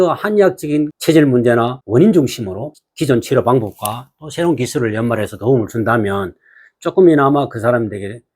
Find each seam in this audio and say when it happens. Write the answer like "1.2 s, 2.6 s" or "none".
0.9 s, 1.8 s, 2.8 s